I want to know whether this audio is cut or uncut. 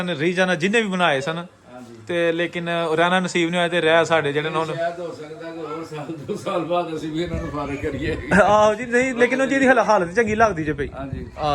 uncut